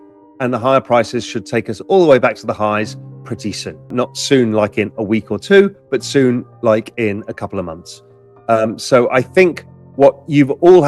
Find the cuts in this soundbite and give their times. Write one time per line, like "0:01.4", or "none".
0:03.9